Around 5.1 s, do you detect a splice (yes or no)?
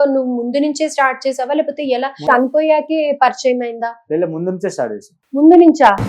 yes